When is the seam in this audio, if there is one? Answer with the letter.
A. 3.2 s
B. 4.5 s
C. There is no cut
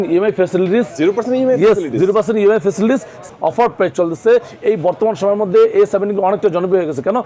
A